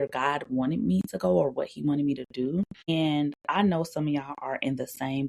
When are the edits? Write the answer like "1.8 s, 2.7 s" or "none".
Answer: 2.8 s